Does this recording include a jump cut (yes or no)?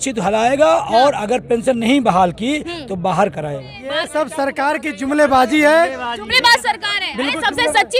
yes